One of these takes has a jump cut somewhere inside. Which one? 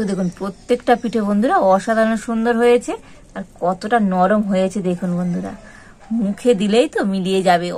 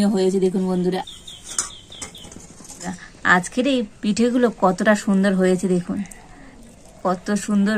second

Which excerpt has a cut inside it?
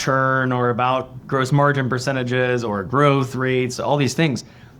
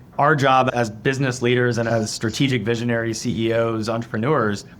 first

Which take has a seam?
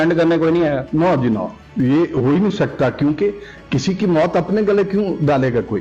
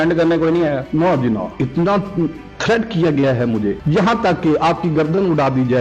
second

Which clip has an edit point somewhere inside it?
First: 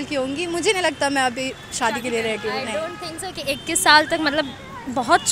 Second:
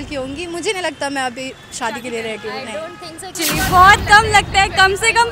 second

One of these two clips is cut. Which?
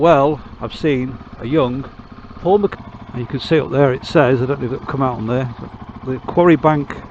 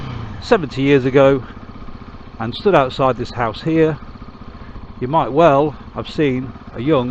first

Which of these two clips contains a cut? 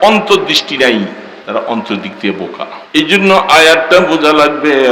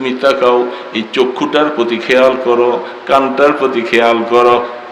first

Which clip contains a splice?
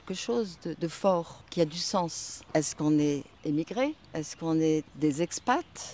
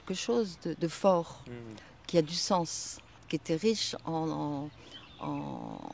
first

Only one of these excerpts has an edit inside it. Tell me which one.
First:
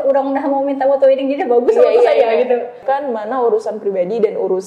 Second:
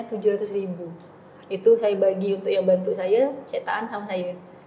first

